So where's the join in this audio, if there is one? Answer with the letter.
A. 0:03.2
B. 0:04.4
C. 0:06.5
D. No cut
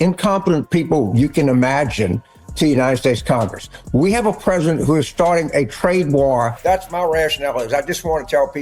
C